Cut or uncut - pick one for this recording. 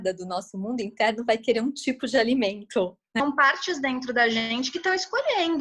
cut